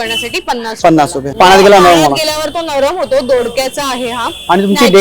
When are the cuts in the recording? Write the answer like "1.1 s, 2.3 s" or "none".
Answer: 1.3 s